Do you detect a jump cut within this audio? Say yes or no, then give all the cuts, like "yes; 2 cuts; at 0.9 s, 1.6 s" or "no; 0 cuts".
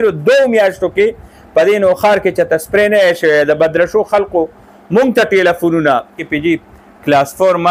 yes; 1 cut; at 6.2 s